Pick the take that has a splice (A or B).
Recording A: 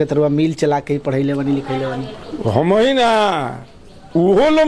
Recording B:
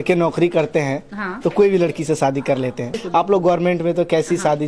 B